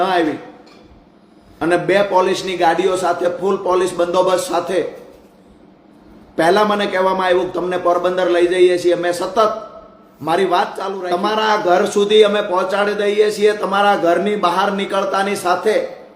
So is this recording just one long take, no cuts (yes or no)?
no